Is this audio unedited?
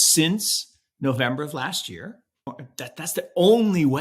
no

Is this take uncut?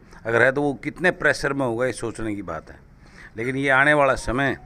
yes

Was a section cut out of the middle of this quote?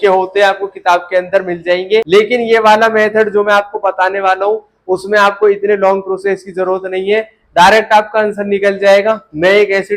yes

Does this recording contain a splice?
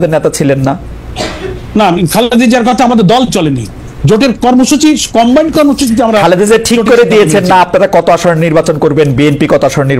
no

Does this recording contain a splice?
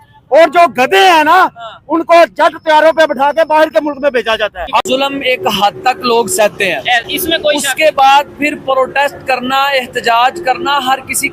yes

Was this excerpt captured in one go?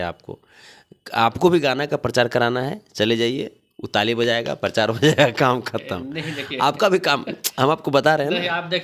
yes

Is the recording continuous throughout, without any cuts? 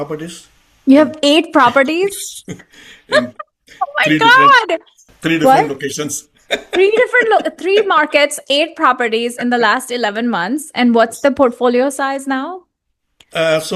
yes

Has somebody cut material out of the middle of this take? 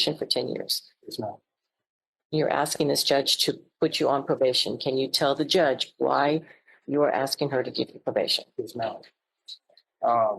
no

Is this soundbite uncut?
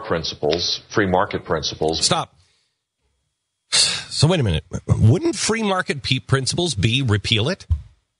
yes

